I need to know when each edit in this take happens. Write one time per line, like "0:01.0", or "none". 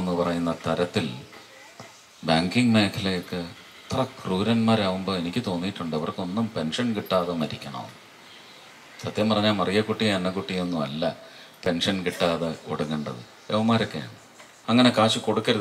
0:14.5